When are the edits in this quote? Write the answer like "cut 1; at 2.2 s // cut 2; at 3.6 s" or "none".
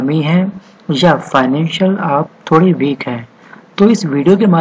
cut 1; at 1.3 s